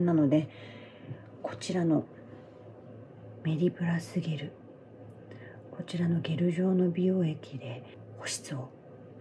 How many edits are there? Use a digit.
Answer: 1